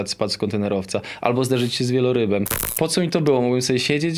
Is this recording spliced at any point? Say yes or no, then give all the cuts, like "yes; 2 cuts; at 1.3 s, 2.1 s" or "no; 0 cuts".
yes; 1 cut; at 2.6 s